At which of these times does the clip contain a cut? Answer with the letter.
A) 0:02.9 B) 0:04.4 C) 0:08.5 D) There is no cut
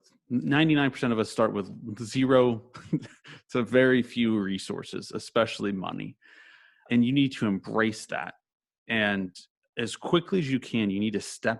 D